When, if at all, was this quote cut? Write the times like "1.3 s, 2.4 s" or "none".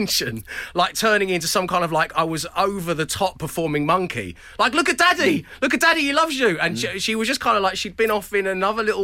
none